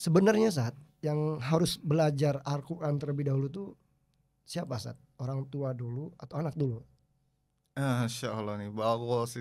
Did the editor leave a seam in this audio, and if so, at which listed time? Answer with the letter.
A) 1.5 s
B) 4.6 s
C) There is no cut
C